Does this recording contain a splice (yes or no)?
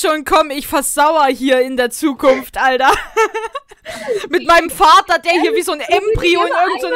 no